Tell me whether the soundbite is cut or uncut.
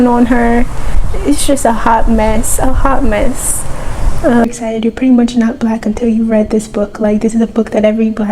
cut